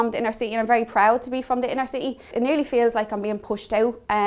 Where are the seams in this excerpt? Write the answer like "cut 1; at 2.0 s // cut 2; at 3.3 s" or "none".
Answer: cut 1; at 2.3 s